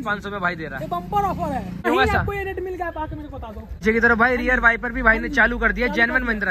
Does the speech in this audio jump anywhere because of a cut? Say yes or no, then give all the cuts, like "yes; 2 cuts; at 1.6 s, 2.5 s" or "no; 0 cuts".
yes; 2 cuts; at 1.9 s, 3.8 s